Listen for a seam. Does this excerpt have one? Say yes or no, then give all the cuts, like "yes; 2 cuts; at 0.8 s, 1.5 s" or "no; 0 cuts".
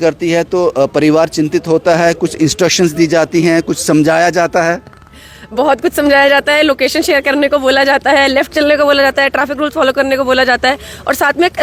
no; 0 cuts